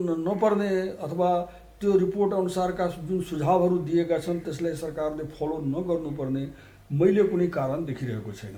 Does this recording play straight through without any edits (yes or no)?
yes